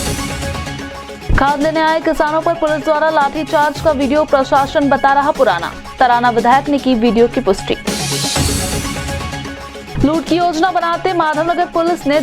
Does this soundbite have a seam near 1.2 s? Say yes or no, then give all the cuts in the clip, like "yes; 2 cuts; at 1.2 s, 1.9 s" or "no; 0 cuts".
yes; 1 cut; at 1.2 s